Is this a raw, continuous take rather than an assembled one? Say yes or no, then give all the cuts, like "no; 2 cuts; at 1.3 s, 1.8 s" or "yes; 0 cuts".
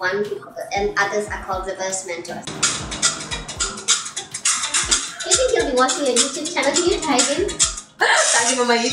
no; 1 cut; at 2.6 s